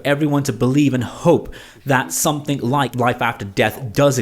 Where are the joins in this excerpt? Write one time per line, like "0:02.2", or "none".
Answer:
0:02.9